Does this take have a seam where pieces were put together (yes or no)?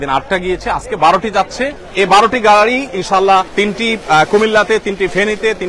yes